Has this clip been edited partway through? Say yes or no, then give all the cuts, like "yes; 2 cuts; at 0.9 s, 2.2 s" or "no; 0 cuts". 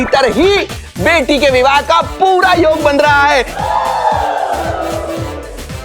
no; 0 cuts